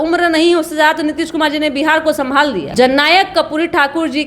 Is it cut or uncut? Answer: cut